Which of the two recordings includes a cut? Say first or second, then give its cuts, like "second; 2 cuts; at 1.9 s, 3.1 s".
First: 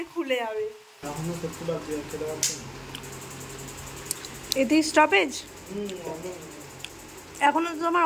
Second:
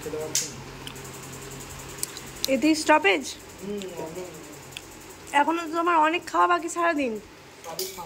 first; 1 cut; at 1.0 s